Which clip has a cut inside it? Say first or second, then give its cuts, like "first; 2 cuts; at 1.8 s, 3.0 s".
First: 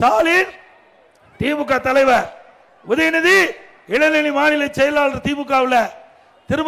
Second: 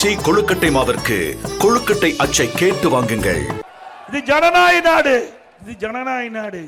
second; 1 cut; at 3.6 s